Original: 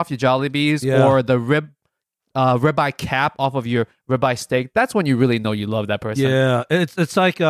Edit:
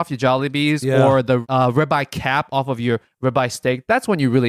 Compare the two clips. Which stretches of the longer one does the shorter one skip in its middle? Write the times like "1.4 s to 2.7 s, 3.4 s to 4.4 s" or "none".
1.4 s to 2.3 s